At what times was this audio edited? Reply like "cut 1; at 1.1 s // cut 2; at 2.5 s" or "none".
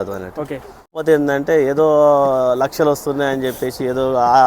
cut 1; at 1.0 s